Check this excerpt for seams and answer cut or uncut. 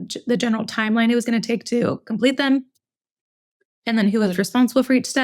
uncut